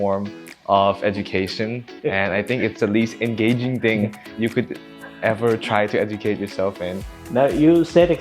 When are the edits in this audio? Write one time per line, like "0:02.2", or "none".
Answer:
0:07.2